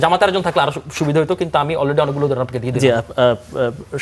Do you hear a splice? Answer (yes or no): no